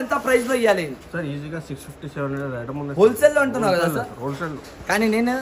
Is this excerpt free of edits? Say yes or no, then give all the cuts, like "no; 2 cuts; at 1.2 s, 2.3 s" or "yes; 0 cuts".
yes; 0 cuts